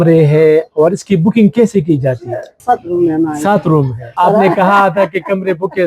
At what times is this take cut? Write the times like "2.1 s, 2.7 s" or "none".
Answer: 4.0 s